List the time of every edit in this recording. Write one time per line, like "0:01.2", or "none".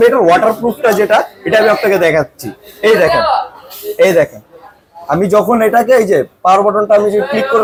none

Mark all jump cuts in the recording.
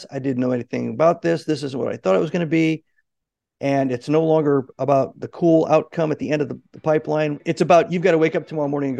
0:07.4

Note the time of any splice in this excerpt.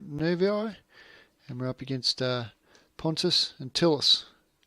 0:03.2

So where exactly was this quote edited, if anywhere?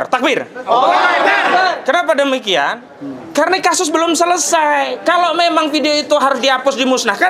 none

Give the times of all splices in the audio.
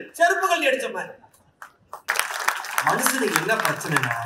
0:02.1

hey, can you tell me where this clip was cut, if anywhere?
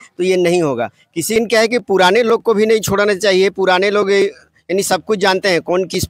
0:01.3

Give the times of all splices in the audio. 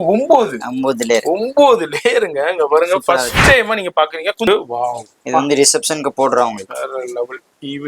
0:04.5

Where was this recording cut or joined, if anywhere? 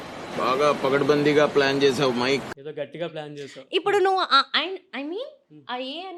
none

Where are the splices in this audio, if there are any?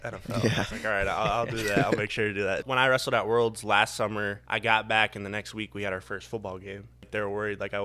0:02.6
0:04.4
0:07.1

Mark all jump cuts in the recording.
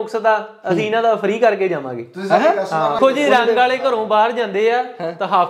0:03.0

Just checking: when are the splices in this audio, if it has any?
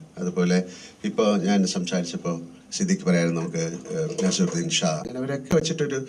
0:05.0

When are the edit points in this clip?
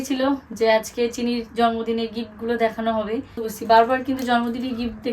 0:03.5

